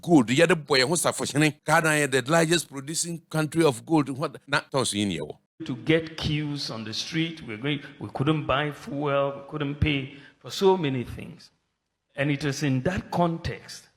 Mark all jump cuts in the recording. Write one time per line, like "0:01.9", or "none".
0:01.6
0:03.2
0:04.5
0:05.5